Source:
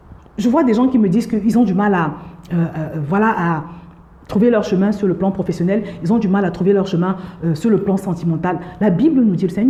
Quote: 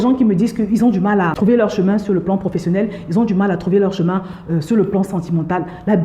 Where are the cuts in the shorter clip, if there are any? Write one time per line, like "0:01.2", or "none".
0:01.3